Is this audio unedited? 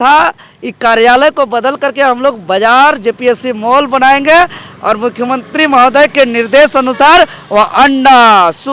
yes; 0 cuts

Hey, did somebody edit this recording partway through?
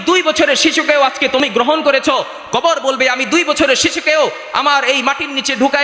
no; 0 cuts

